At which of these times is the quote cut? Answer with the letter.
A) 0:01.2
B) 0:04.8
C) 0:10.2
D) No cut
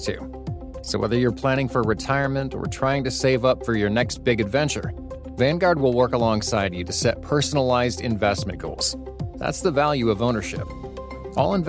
D